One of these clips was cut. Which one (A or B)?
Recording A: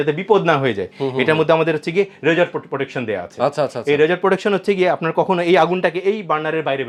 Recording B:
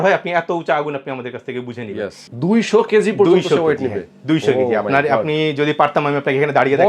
B